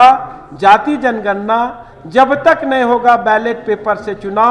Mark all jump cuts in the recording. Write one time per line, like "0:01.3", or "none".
none